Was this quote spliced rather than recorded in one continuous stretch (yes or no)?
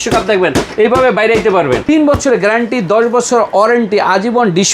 yes